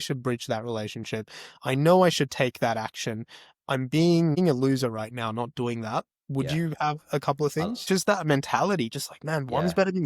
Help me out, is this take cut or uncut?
cut